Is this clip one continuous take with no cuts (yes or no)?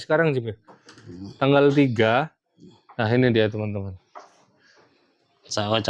yes